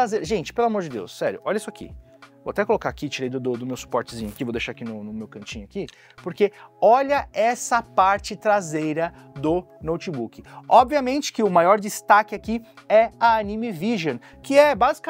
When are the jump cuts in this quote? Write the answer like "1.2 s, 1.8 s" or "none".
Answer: none